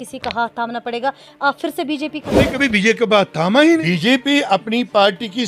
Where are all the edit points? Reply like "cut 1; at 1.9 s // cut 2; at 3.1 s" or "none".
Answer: cut 1; at 2.4 s // cut 2; at 3.8 s